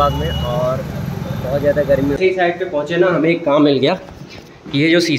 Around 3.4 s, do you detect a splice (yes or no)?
no